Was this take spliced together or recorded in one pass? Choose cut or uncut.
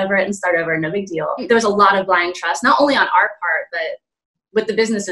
cut